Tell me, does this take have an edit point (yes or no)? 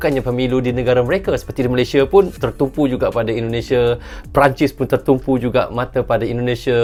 no